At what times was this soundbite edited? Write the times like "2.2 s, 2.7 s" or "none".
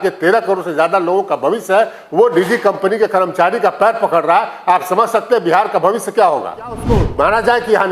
6.9 s